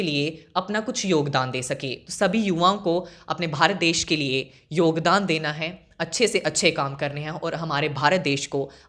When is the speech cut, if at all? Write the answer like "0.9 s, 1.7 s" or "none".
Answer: 2.0 s